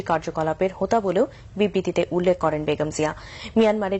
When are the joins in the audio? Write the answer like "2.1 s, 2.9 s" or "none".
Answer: none